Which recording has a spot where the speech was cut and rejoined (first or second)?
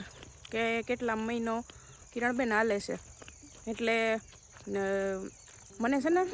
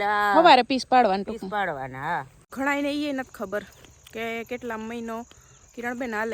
second